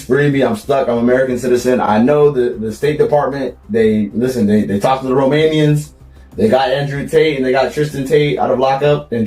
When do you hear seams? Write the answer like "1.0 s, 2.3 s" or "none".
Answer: none